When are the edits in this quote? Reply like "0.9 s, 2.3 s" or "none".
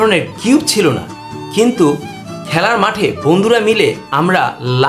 none